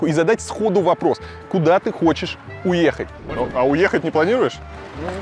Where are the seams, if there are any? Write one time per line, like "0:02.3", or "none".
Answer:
0:03.2